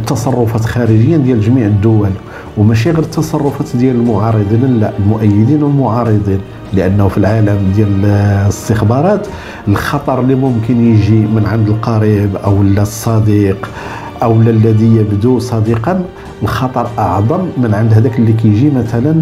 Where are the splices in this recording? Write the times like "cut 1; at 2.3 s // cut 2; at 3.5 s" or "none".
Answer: none